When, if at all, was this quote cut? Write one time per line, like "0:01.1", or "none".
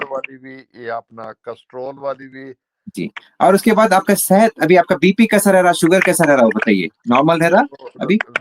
0:02.9